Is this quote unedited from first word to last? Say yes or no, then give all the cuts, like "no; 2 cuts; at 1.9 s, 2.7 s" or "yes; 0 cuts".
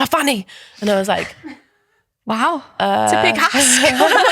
yes; 0 cuts